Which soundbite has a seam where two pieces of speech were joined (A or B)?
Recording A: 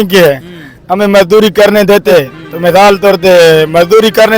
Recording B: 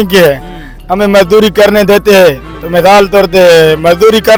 A